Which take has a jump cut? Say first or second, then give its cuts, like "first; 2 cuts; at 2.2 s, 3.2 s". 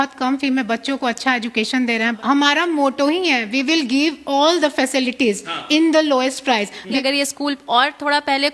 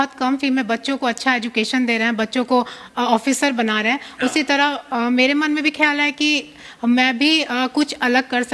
first; 2 cuts; at 2.2 s, 7.0 s